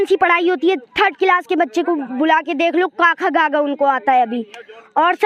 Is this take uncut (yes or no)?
yes